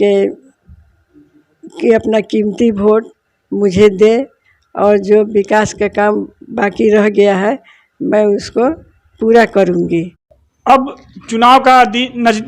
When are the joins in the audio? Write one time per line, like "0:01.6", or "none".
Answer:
none